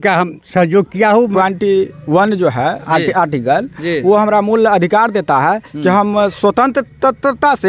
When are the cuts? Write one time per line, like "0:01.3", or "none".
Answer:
0:01.3